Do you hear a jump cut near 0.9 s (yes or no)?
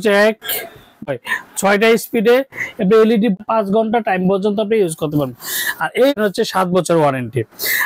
yes